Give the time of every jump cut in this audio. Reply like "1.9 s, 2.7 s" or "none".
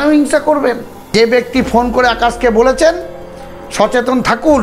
0.9 s